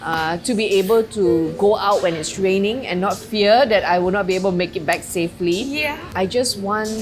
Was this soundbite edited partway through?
yes; 1 cut; at 6.1 s

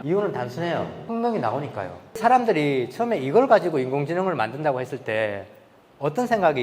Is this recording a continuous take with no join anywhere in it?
no; 2 cuts; at 1.0 s, 2.2 s

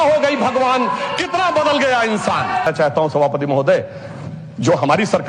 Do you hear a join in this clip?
yes; 1 cut; at 2.7 s

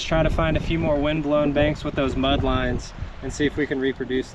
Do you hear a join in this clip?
no; 0 cuts

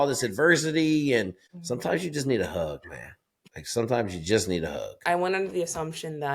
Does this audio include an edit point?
no; 0 cuts

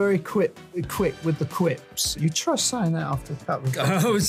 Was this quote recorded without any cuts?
no; 1 cut; at 2.0 s

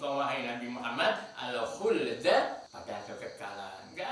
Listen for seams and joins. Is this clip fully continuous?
no; 1 cut; at 2.7 s

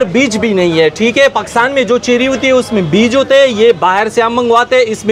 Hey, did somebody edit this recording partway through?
no; 0 cuts

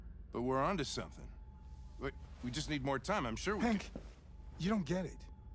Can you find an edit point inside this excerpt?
no; 0 cuts

